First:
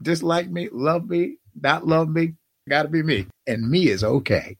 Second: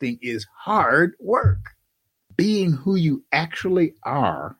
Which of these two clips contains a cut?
first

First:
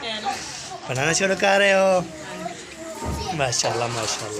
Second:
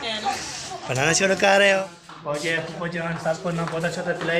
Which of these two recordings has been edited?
second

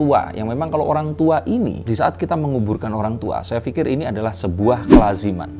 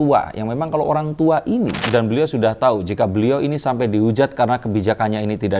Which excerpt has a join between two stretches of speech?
second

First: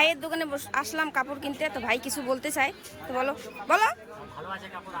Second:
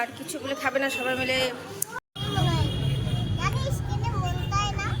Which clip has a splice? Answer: second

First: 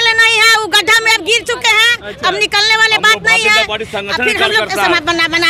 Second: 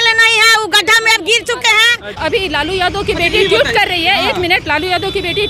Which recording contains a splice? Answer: second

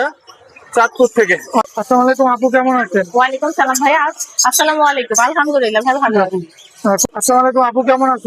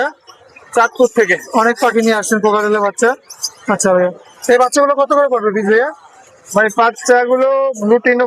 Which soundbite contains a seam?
first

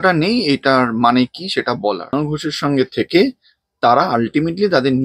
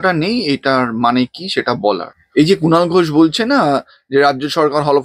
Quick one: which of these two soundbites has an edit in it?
first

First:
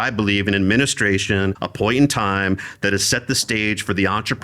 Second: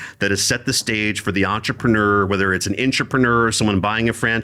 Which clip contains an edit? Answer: first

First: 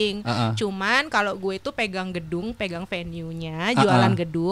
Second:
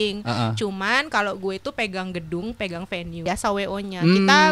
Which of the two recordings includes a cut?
second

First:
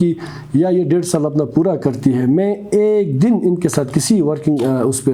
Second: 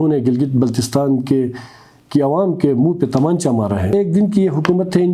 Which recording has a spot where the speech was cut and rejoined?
second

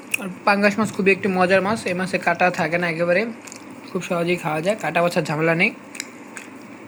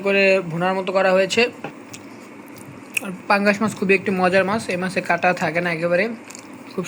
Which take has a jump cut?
second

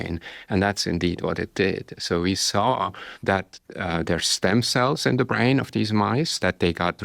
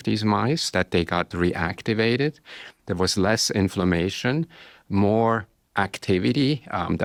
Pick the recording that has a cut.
first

